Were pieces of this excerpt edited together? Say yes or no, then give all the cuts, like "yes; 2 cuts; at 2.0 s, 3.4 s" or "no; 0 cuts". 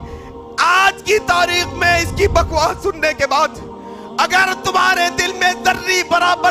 no; 0 cuts